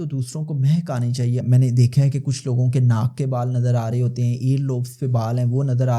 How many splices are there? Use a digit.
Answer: 1